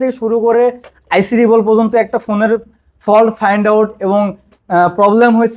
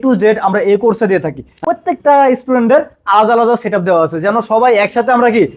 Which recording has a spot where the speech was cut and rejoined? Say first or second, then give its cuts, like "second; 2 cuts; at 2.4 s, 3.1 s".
second; 1 cut; at 1.6 s